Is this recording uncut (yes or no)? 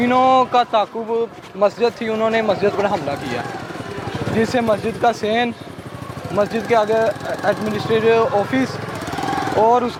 yes